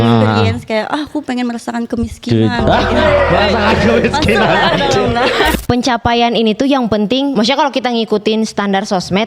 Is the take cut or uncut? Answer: cut